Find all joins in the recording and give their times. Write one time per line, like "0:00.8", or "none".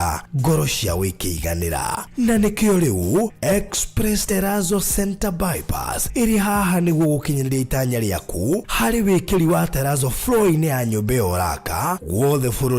0:04.2